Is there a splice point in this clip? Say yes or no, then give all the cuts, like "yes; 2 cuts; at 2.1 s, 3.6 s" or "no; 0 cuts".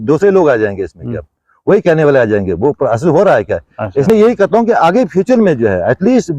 yes; 1 cut; at 4.1 s